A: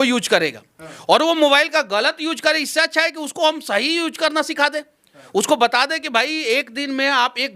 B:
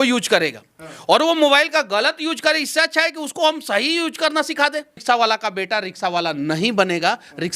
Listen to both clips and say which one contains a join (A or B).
B